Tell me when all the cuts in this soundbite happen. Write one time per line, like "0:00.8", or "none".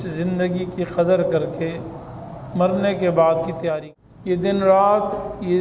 0:03.8